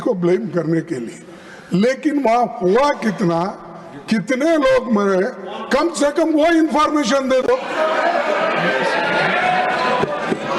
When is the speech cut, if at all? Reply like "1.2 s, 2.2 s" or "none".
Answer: none